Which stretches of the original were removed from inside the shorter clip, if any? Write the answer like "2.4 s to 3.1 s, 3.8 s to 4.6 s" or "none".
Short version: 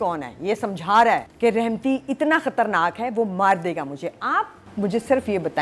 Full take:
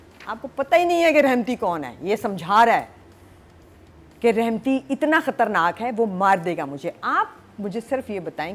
2.9 s to 4.1 s